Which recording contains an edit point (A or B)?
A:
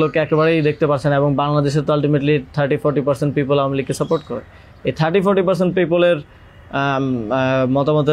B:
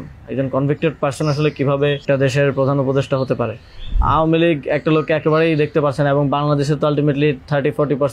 B